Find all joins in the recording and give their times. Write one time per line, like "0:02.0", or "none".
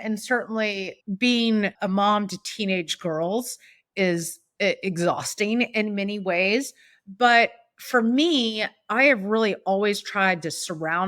0:00.9
0:01.7